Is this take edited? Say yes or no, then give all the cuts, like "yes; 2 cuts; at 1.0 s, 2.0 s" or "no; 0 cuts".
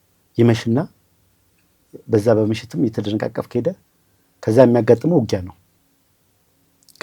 no; 0 cuts